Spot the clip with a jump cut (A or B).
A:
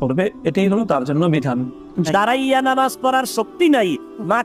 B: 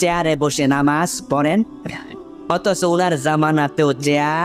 A